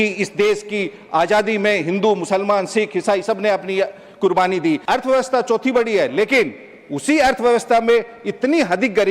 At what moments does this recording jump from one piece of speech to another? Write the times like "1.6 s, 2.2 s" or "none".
4.8 s